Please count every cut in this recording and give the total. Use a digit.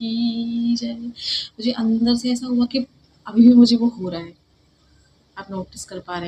0